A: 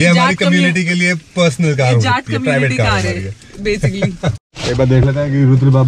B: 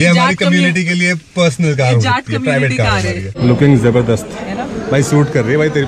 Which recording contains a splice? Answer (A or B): B